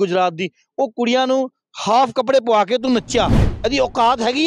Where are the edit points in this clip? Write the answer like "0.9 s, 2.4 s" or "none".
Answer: 3.5 s